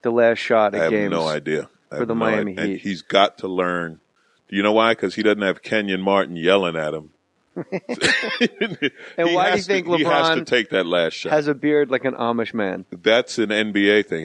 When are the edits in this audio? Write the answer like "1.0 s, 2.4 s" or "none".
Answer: 11.4 s